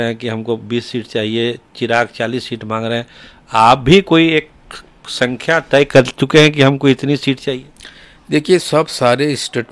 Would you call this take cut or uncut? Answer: uncut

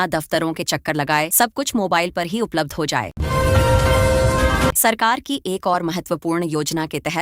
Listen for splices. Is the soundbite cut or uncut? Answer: cut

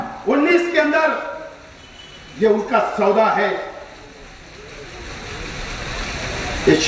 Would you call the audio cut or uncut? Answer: uncut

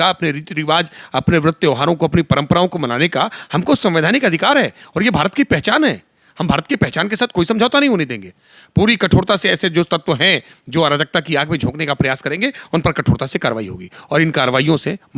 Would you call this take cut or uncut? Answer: uncut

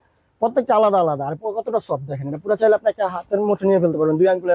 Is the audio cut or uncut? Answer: uncut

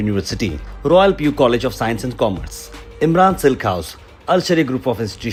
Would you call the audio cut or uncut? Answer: uncut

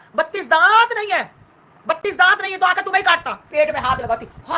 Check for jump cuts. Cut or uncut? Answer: cut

